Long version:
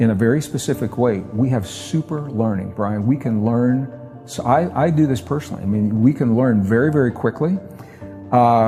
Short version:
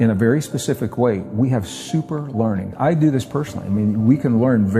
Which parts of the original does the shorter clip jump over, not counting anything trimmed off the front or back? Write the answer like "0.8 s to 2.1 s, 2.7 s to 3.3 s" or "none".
2.7 s to 4.7 s

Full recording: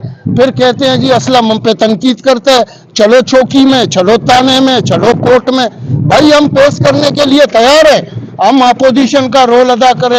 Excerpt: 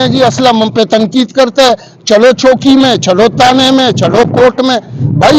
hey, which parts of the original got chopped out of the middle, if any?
none

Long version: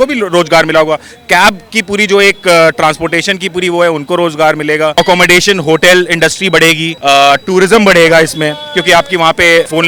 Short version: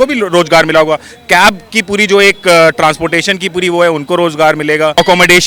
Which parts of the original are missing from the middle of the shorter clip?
none

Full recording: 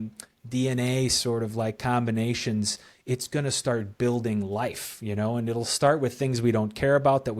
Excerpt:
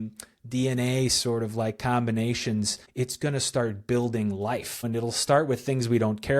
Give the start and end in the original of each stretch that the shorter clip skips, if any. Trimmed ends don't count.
2.8 s to 2.9 s, 4.9 s to 5.4 s

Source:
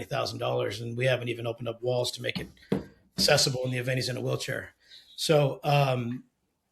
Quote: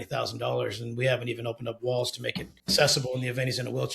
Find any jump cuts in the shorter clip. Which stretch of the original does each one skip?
2.5 s to 3.0 s

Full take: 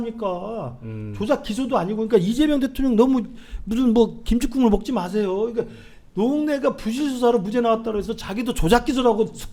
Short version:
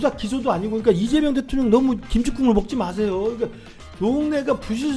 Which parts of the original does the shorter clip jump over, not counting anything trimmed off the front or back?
3.3 s to 4.2 s

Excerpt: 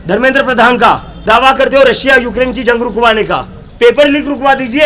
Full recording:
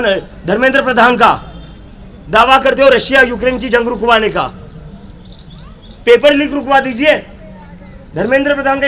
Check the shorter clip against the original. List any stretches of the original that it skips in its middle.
1.5 s to 2.2 s, 4.6 s to 5.8 s

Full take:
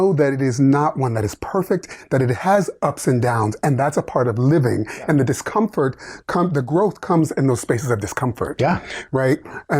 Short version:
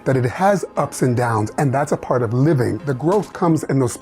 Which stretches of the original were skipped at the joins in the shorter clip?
5.0 s to 6.6 s

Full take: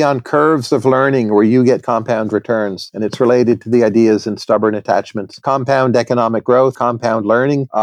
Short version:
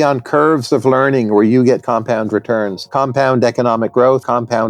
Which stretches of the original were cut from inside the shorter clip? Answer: 2.8 s to 5.3 s

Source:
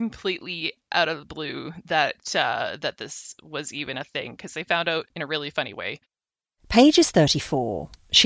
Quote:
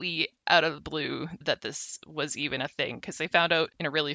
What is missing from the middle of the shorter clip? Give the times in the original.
1.8 s to 2.7 s

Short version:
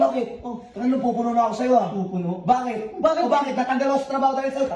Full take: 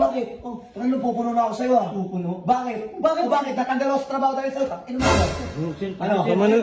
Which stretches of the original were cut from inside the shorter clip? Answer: none

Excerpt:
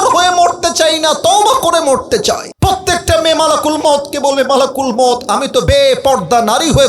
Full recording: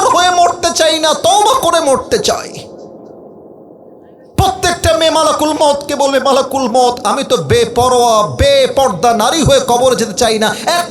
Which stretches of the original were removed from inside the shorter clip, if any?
2.5 s to 4.2 s, 7.4 s to 8.4 s

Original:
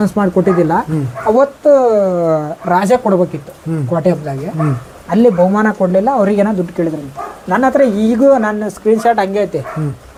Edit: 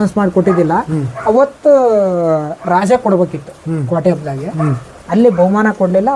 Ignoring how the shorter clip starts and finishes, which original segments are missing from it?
none

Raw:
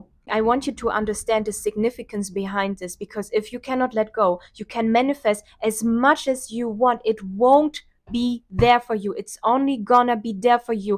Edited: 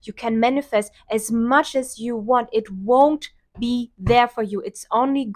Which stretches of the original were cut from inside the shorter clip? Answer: none

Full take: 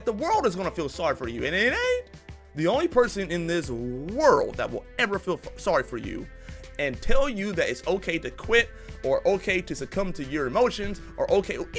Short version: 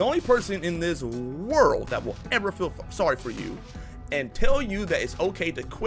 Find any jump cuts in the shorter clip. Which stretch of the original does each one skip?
none

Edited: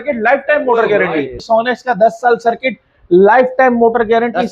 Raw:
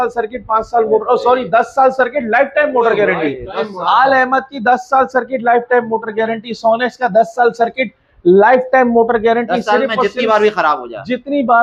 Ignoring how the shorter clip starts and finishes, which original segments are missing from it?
3.4 s to 6.5 s

